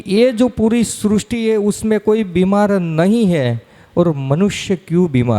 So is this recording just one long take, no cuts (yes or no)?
yes